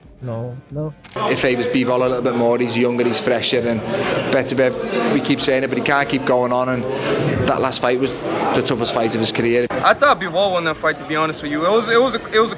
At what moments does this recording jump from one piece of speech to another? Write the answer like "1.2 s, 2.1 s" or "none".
1.1 s, 4.8 s, 9.7 s